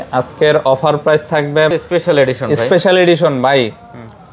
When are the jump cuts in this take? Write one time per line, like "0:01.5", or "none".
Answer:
0:01.7